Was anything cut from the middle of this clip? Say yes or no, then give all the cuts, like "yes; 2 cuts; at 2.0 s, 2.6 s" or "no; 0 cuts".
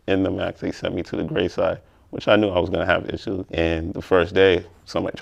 no; 0 cuts